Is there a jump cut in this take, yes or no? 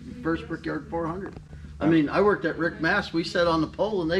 no